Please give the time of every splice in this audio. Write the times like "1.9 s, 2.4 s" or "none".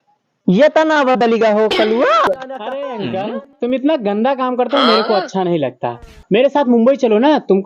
2.5 s